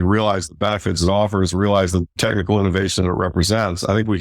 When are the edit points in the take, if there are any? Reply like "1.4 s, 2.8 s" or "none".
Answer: 2.1 s

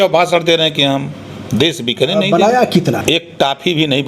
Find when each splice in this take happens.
3.0 s

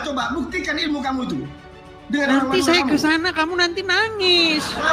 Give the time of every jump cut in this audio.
none

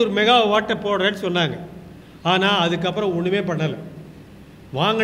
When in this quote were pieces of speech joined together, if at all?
none

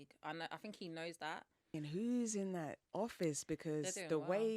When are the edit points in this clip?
1.7 s

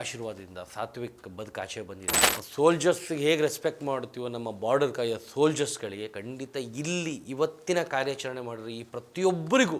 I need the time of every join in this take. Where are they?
2.2 s

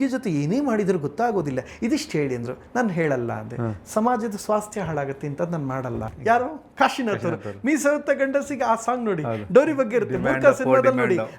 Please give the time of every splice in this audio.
6.1 s

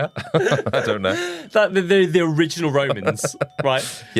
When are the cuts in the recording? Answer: none

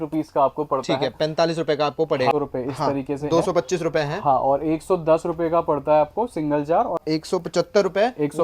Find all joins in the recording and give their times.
2.3 s, 7.0 s

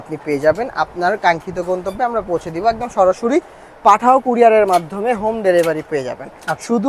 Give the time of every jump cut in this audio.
none

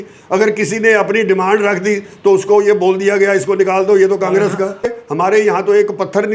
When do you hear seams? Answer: 4.9 s

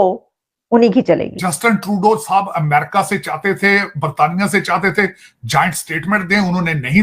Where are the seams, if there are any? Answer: 1.3 s

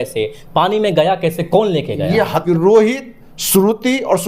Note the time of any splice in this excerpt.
2.4 s

